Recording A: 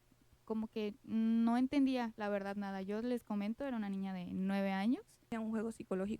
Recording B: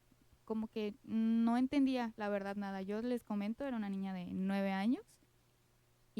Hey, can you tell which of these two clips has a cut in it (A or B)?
A